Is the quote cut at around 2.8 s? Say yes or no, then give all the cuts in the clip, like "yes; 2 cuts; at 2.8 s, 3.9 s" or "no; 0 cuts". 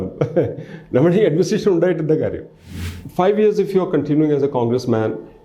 yes; 1 cut; at 2.8 s